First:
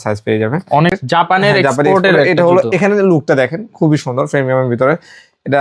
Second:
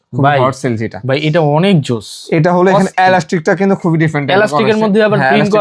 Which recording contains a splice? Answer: first; 1 cut; at 1.0 s

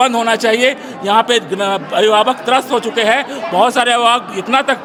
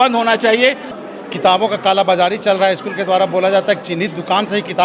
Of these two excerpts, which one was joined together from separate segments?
second; 1 cut; at 1.0 s

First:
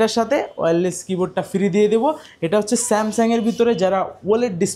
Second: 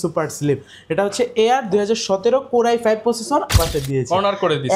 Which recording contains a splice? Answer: second; 1 cut; at 3.5 s

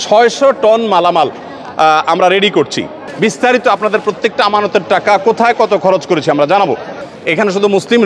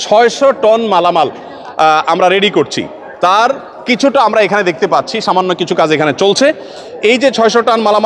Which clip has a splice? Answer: first; 2 cuts; at 3.0 s, 7.0 s

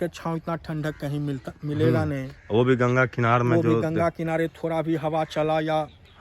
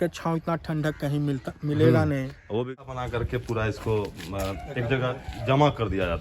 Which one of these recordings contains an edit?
second; 1 cut; at 2.7 s

